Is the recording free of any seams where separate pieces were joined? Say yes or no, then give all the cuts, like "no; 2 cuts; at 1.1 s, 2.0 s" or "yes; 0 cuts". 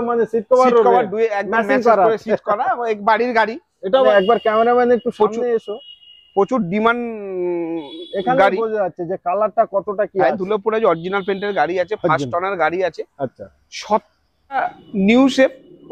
no; 2 cuts; at 4.1 s, 14.6 s